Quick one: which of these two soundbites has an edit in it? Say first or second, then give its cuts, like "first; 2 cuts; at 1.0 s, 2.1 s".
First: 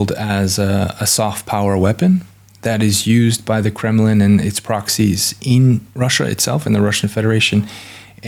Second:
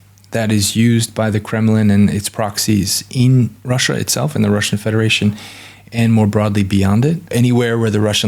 second; 1 cut; at 7.3 s